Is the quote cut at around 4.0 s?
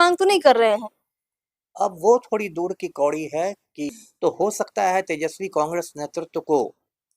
yes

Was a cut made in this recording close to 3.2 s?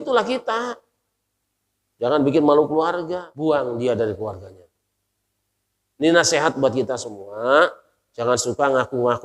yes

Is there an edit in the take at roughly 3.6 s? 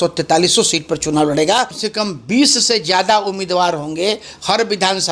no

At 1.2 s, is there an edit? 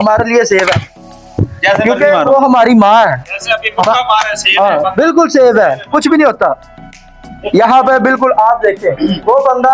yes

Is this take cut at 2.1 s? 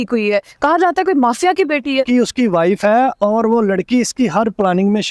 yes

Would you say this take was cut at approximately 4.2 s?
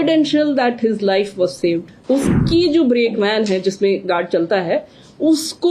no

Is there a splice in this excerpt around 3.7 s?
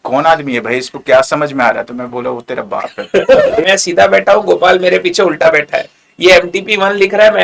yes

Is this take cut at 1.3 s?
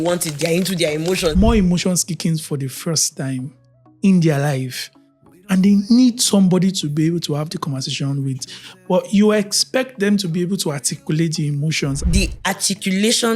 yes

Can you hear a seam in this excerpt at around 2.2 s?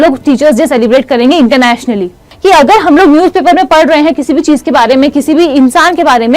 yes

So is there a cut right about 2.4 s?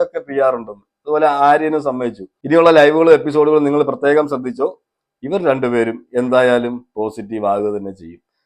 yes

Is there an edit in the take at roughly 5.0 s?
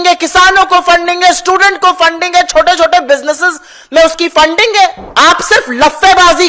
yes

